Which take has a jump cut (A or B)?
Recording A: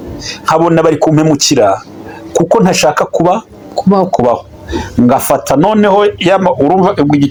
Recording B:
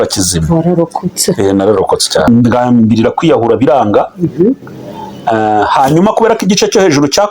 B